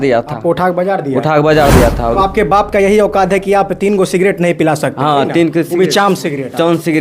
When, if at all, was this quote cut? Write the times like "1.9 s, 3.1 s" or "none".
2.2 s